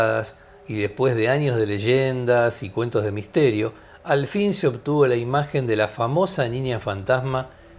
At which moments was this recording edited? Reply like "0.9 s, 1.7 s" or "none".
none